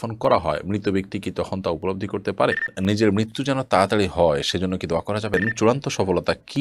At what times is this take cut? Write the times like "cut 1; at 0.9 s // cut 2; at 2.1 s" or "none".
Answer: cut 1; at 2.7 s // cut 2; at 5.3 s